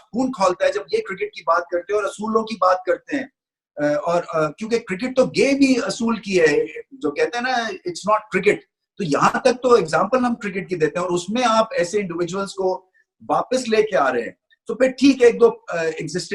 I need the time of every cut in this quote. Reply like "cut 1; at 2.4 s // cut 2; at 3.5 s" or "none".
none